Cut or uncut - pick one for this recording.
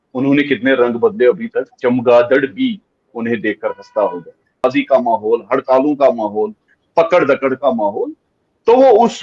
cut